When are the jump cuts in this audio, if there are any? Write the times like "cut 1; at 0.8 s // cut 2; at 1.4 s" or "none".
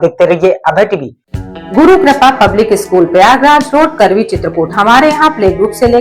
cut 1; at 1.1 s